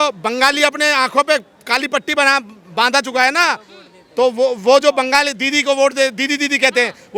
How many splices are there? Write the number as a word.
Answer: zero